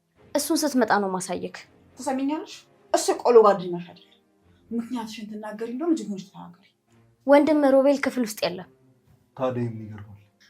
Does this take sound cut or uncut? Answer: uncut